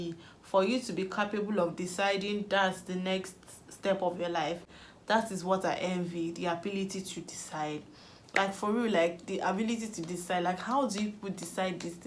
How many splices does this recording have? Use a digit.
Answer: 0